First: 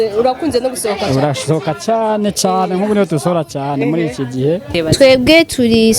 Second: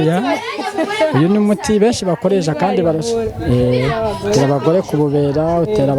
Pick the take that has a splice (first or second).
first